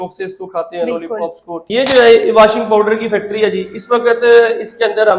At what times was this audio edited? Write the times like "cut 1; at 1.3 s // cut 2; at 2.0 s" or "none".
cut 1; at 1.6 s